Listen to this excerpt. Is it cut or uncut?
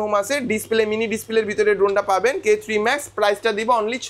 uncut